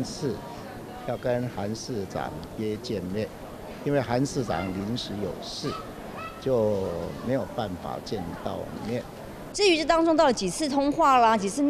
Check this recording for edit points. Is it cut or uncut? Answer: cut